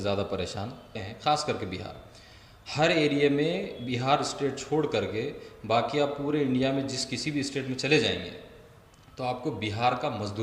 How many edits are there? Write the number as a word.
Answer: one